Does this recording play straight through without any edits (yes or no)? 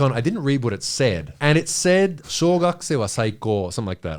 no